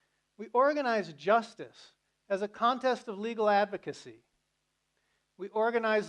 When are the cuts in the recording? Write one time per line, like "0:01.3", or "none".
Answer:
0:02.5